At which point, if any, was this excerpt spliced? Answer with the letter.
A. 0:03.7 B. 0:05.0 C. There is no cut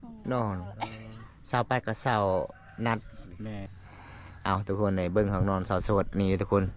A